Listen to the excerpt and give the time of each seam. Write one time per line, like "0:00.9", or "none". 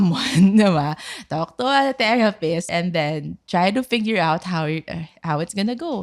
0:02.7